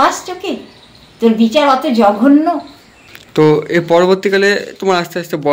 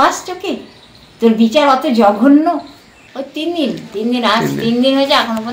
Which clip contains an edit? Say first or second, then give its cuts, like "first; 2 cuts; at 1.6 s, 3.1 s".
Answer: second; 1 cut; at 2.4 s